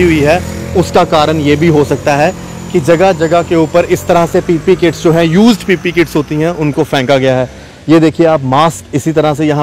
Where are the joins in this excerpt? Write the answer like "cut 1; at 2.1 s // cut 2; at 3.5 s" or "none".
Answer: none